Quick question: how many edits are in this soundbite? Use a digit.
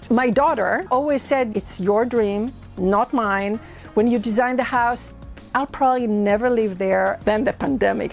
2